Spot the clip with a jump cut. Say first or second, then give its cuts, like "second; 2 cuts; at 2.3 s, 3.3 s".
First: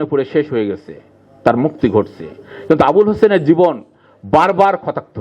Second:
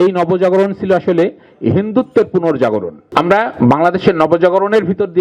second; 1 cut; at 3.0 s